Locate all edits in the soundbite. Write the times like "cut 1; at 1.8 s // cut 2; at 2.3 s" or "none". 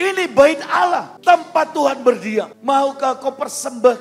cut 1; at 1.1 s // cut 2; at 2.5 s